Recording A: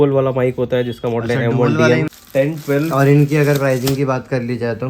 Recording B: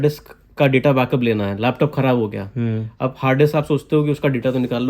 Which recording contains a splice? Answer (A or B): A